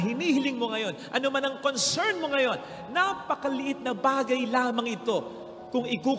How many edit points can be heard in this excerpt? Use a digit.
0